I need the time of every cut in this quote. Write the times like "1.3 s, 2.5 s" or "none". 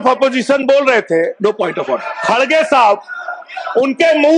none